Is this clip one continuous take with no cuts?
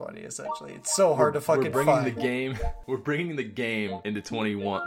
no; 2 cuts; at 2.7 s, 4.0 s

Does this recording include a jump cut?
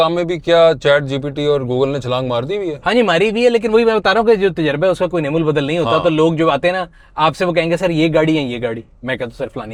no; 0 cuts

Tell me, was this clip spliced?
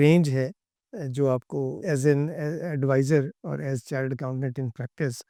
no; 0 cuts

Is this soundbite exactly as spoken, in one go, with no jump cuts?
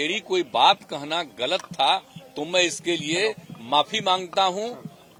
yes; 0 cuts

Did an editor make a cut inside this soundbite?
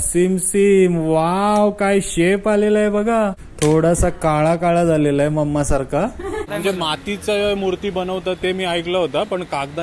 yes; 2 cuts; at 3.4 s, 6.4 s

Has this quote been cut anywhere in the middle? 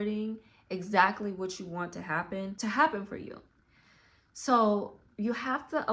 yes; 1 cut; at 2.5 s

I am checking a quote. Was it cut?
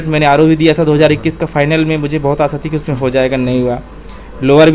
no; 0 cuts

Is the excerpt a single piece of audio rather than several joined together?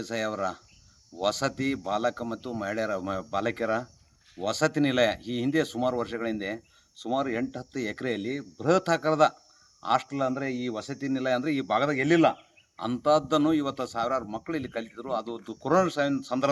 yes; 0 cuts

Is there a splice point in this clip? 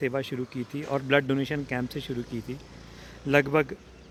no; 0 cuts

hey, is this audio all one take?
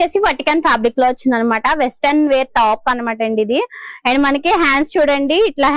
yes; 0 cuts

